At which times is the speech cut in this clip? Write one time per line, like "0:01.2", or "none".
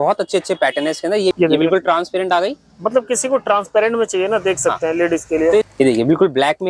0:01.3
0:05.7